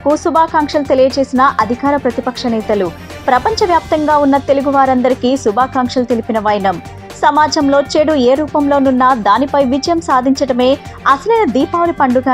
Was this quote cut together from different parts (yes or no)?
no